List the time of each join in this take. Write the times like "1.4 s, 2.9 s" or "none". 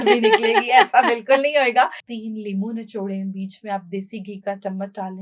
2.1 s